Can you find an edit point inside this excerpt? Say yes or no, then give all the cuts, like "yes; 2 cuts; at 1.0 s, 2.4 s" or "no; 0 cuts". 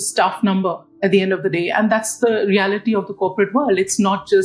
no; 0 cuts